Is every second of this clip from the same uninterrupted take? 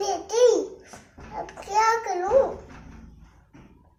yes; 0 cuts

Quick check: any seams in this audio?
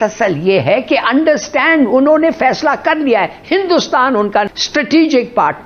yes; 1 cut; at 4.5 s

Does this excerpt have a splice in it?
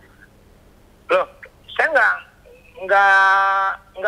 no; 0 cuts

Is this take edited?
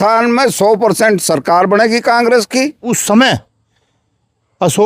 yes; 1 cut; at 2.9 s

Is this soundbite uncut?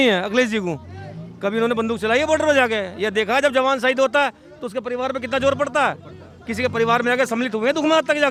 yes; 0 cuts

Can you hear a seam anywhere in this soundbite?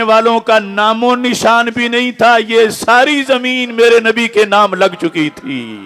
no; 0 cuts

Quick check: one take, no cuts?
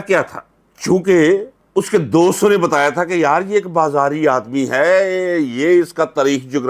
yes; 0 cuts

